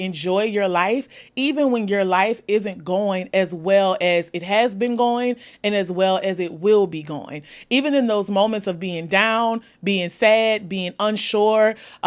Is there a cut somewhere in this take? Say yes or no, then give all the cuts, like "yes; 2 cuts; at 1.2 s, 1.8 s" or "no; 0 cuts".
no; 0 cuts